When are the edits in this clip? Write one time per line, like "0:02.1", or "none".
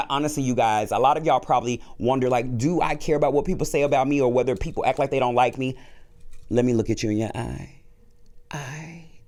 none